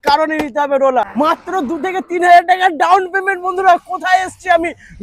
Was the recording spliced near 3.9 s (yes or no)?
no